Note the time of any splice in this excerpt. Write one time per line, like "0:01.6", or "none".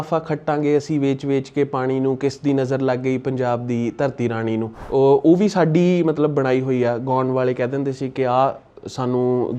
0:04.8